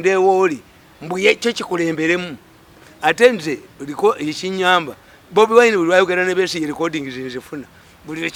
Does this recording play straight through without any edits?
yes; 0 cuts

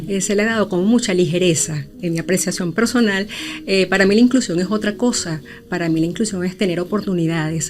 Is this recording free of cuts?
no; 1 cut; at 2.0 s

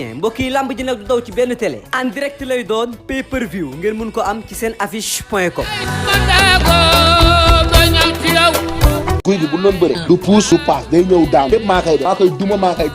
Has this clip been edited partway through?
yes; 1 cut; at 9.2 s

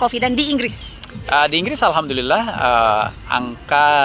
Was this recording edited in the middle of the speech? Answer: no; 0 cuts

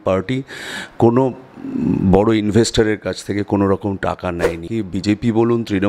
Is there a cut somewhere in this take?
yes; 1 cut; at 4.7 s

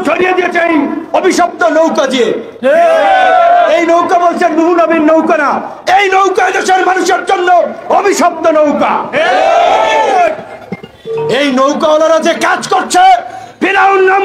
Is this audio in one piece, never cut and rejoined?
yes; 0 cuts

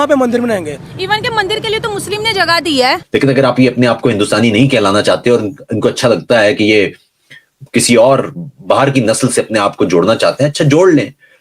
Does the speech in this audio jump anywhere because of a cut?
yes; 1 cut; at 3.0 s

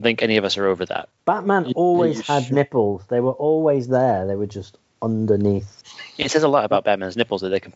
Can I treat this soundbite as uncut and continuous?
no; 2 cuts; at 1.1 s, 5.8 s

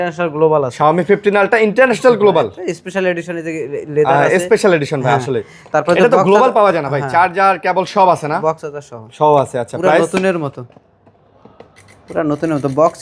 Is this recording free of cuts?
yes; 0 cuts

